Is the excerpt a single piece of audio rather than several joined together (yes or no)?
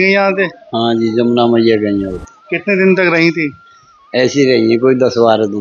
yes